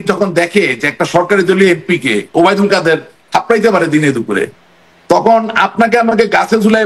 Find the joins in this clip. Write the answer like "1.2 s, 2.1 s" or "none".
none